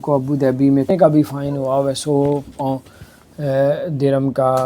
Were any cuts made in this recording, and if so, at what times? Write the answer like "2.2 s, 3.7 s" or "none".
0.9 s